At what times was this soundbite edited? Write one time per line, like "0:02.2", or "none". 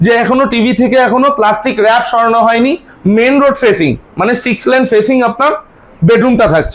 0:02.9